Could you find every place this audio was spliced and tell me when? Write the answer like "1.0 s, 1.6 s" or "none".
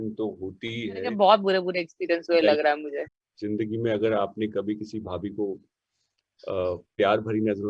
1.1 s, 2.9 s